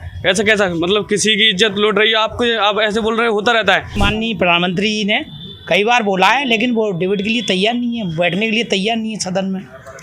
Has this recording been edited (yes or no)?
yes